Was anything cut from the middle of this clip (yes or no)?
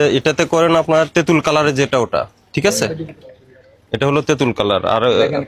no